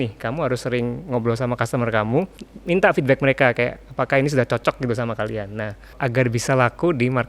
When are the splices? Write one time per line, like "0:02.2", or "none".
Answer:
0:02.5
0:06.0